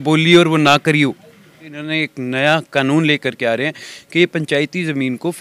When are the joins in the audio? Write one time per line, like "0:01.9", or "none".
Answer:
0:01.8